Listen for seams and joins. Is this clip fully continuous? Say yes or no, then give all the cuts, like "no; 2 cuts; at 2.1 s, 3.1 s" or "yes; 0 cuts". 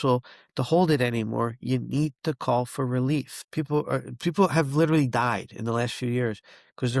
no; 1 cut; at 3.4 s